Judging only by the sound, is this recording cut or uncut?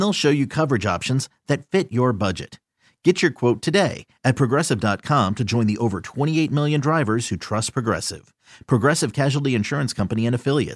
uncut